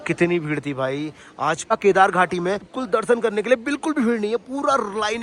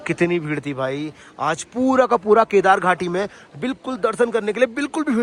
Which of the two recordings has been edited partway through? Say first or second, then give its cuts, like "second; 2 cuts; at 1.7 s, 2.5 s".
first; 2 cuts; at 1.7 s, 2.7 s